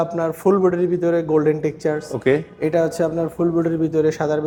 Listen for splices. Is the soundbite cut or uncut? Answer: uncut